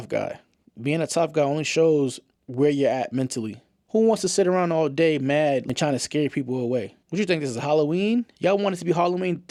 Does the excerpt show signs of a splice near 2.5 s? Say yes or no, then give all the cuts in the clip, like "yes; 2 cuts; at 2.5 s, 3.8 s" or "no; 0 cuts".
no; 0 cuts